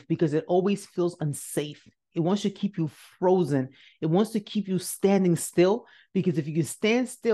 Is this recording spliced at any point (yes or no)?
no